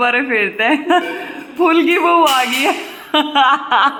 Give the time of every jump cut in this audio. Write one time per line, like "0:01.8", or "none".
none